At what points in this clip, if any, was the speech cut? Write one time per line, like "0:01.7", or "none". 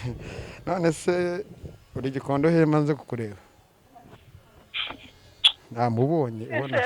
none